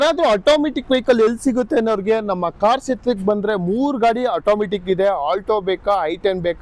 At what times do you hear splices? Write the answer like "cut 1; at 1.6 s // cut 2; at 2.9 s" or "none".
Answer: none